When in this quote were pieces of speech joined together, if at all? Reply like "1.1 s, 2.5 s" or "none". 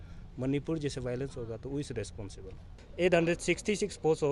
2.7 s